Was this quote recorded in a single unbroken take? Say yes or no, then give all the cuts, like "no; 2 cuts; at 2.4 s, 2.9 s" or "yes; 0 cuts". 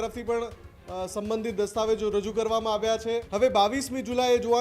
no; 1 cut; at 3.3 s